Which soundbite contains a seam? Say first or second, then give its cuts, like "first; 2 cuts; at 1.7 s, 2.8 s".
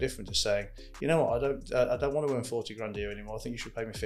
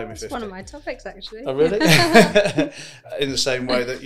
second; 1 cut; at 3.1 s